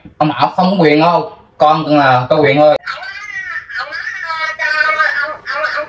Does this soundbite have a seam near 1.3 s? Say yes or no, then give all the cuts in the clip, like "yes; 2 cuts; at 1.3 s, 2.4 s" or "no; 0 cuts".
no; 1 cut; at 2.8 s